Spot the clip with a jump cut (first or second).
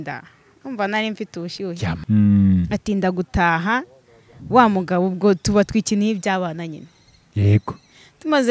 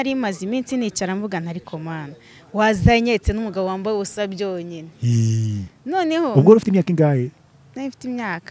first